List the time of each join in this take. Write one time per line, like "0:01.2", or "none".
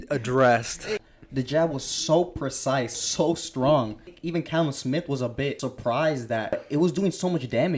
0:01.2
0:03.0
0:04.2
0:05.7
0:06.6